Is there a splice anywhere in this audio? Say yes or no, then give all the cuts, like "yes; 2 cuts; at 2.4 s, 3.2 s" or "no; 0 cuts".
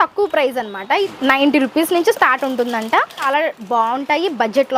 yes; 2 cuts; at 1.1 s, 3.3 s